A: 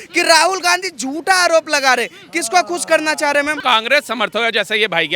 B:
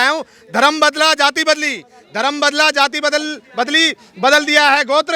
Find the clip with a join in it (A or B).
A